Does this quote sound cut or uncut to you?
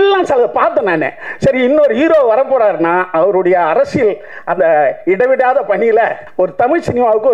cut